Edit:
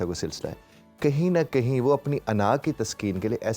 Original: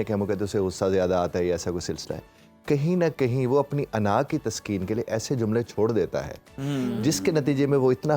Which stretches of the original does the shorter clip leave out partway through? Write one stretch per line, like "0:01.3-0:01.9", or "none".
none